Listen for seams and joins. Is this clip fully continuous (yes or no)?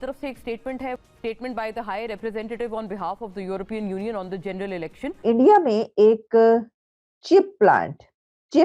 no